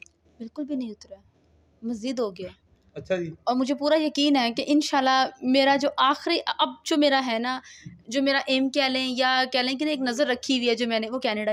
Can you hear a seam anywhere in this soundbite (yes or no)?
no